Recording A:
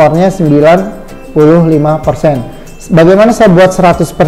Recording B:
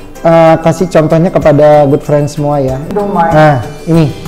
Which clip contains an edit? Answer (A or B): B